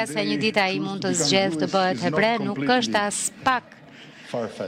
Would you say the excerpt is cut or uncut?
uncut